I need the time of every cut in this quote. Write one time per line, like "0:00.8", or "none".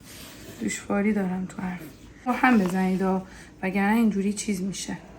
0:02.3